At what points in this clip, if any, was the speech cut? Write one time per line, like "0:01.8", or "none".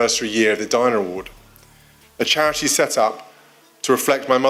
none